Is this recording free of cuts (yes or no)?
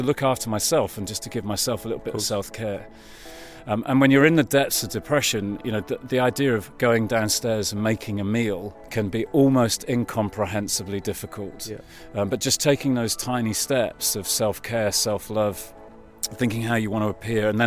no